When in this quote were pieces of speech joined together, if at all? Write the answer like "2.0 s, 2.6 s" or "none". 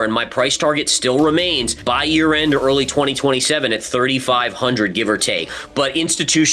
1.7 s, 5.6 s